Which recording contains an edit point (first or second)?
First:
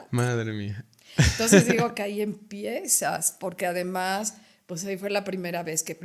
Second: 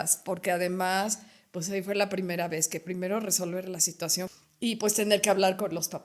second